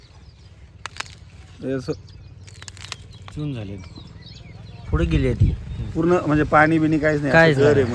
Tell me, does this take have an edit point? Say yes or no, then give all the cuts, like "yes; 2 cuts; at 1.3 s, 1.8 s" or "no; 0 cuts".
no; 0 cuts